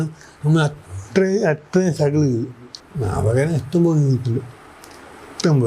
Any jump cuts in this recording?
yes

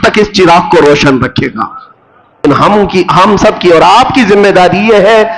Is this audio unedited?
no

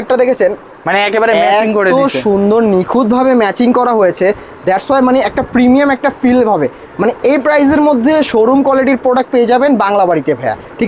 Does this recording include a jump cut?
no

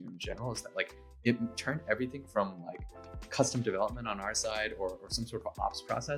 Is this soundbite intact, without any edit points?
yes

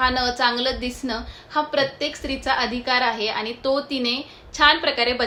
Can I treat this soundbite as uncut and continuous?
yes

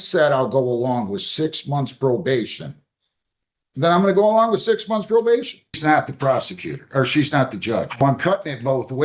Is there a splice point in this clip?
yes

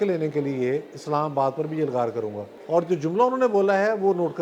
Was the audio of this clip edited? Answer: yes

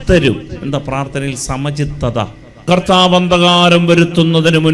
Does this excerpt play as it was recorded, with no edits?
no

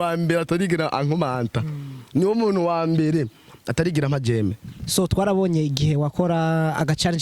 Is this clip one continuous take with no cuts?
yes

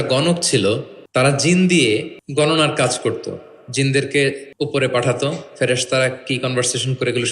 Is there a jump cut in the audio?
yes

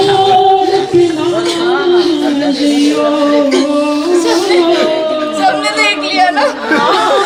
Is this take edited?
no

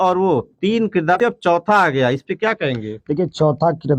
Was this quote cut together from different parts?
yes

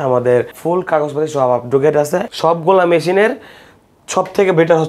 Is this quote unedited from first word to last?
no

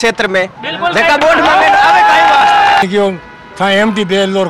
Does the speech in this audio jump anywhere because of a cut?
yes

